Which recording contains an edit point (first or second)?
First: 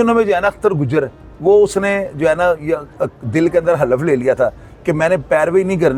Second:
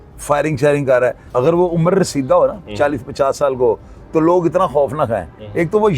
second